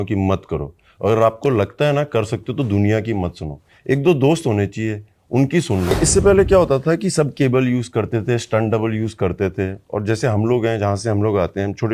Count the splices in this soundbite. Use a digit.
1